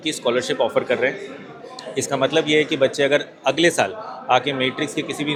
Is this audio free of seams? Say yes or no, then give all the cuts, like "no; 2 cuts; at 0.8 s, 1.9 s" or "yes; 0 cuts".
yes; 0 cuts